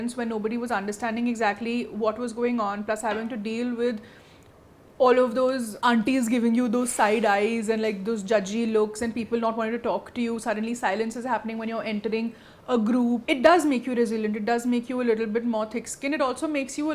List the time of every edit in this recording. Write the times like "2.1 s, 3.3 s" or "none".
none